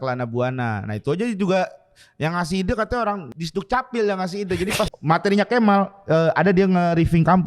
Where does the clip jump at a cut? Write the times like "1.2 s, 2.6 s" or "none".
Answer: 3.3 s, 5.0 s